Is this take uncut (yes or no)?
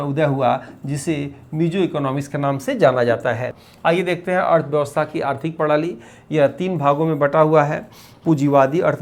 yes